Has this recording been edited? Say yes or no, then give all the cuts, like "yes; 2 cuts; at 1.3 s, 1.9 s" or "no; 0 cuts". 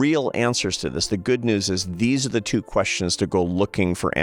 no; 0 cuts